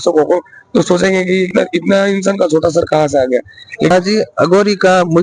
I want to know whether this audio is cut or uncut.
cut